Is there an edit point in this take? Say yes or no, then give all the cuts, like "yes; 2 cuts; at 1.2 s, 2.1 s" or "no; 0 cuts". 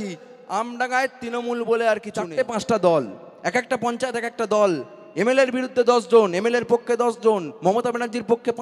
yes; 1 cut; at 2.3 s